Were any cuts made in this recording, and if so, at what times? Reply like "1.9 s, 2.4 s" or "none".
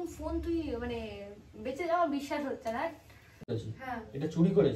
3.5 s